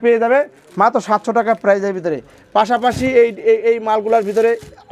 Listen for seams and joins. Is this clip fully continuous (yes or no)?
yes